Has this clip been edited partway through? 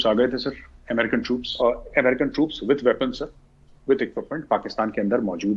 yes; 1 cut; at 1.5 s

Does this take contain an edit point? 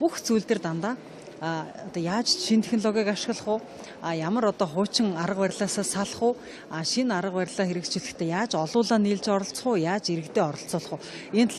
no; 0 cuts

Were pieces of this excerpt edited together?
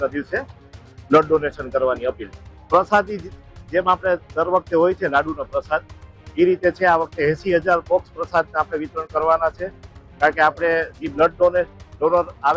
no; 0 cuts

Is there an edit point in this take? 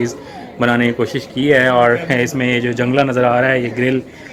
no; 0 cuts

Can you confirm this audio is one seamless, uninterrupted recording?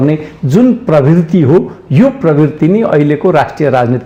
yes; 0 cuts

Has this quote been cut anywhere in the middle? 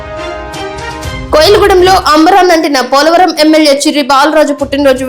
yes; 1 cut; at 1.2 s

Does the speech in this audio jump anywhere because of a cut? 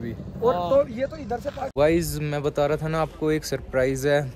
yes; 1 cut; at 1.6 s

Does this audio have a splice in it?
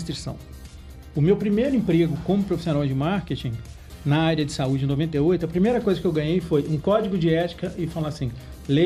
no; 0 cuts

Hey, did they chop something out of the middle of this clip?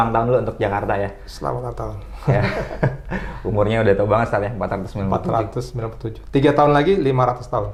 no; 0 cuts

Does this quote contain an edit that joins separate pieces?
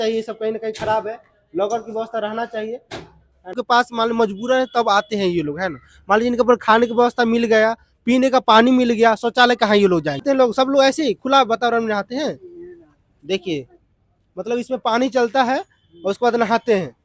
yes; 2 cuts; at 3.5 s, 10.2 s

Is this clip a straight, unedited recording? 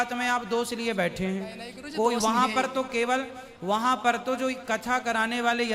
yes; 0 cuts

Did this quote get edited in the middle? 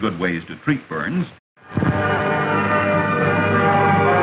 no; 0 cuts

